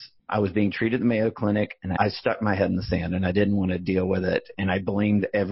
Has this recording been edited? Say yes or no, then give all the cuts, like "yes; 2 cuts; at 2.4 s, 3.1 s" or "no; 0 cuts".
yes; 1 cut; at 1.9 s